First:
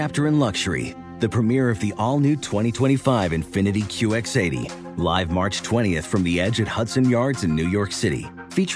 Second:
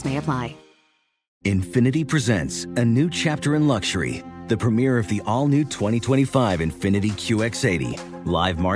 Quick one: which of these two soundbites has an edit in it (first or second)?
second